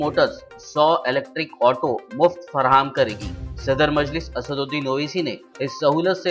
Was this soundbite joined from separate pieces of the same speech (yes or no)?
no